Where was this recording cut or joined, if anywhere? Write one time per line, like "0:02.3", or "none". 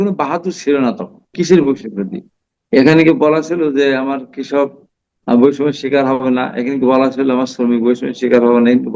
0:01.3